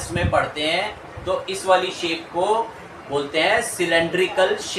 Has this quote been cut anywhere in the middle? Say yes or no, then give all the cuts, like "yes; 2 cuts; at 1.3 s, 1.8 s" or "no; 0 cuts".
no; 0 cuts